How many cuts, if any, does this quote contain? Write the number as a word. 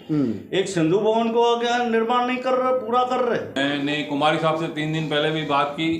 one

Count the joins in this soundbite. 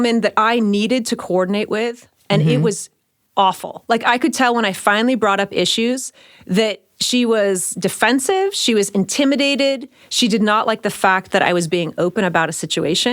zero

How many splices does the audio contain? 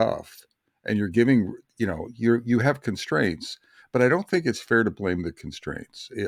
zero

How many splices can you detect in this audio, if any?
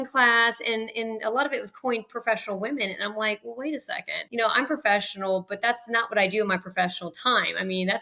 one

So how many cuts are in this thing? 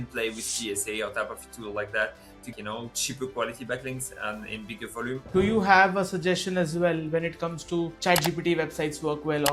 three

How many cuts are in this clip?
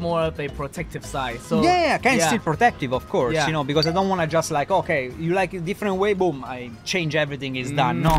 zero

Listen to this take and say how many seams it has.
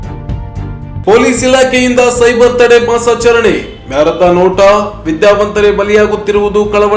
one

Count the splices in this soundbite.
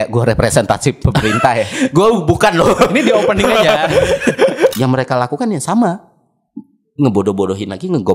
one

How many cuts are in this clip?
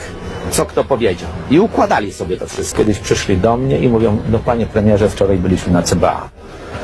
one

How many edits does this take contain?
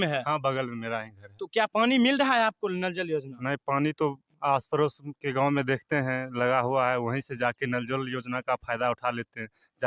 zero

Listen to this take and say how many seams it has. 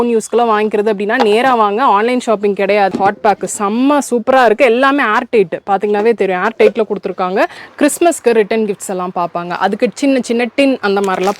two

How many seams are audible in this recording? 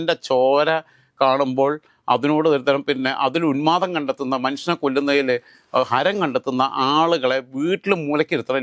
zero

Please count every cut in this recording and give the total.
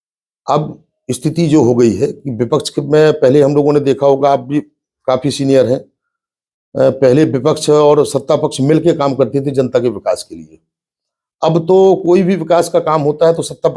zero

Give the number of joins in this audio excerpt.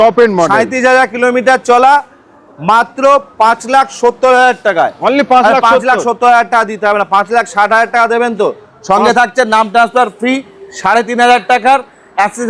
zero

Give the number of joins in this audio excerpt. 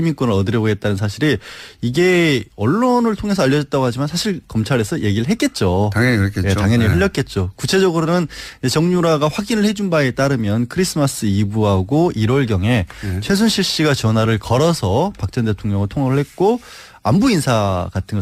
zero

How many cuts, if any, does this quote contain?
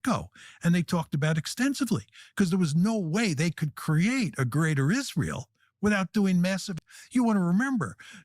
one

